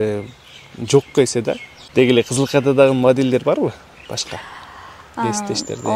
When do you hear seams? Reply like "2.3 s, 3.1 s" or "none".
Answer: 1.8 s